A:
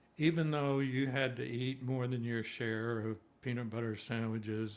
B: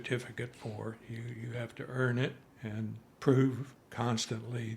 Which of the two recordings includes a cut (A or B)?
B